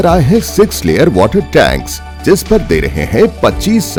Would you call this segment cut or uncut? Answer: uncut